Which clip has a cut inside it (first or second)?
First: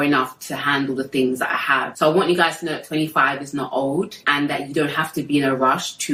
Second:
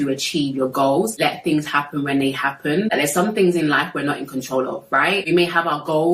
second